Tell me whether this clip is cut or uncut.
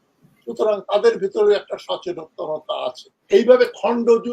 cut